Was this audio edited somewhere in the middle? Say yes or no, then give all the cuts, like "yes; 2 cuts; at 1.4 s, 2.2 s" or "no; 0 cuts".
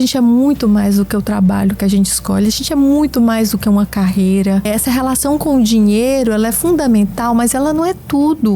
yes; 1 cut; at 4.7 s